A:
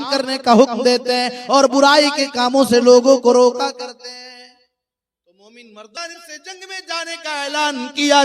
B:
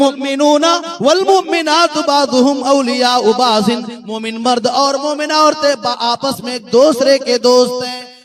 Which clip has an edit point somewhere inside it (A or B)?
A